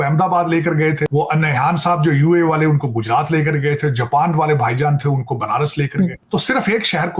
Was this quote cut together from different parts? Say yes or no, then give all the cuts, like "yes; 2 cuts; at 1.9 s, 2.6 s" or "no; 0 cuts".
yes; 2 cuts; at 1.1 s, 6.2 s